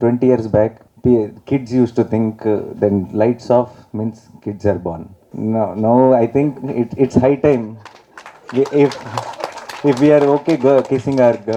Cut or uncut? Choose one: uncut